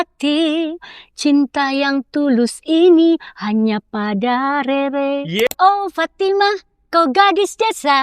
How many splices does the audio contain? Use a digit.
1